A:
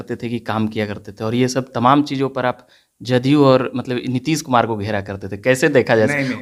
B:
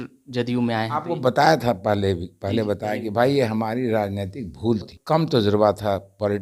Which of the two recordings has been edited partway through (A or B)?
B